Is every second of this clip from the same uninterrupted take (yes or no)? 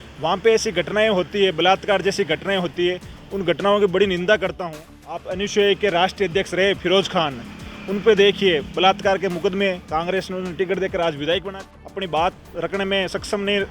no